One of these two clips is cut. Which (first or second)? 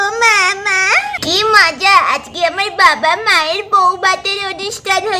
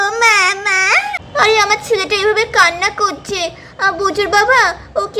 first